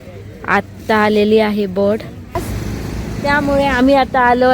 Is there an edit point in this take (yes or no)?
yes